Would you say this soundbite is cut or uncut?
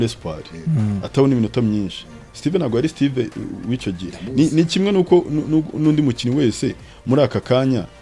uncut